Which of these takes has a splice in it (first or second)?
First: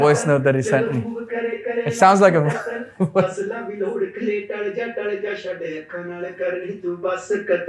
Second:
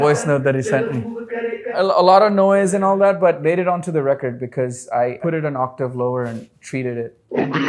second